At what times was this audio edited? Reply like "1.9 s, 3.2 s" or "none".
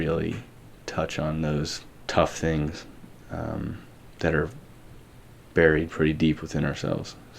1.9 s